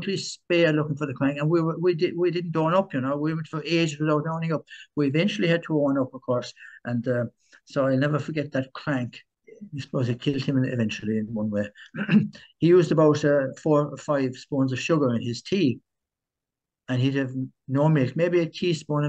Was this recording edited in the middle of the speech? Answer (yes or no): yes